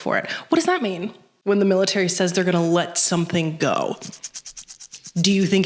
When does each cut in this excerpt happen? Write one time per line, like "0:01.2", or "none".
0:01.4